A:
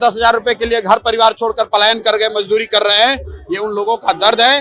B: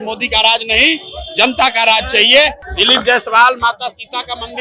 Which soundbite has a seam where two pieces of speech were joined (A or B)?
B